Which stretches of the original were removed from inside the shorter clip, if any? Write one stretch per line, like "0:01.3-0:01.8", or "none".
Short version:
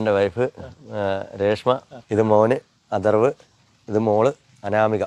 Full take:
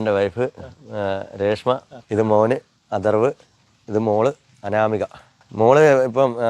none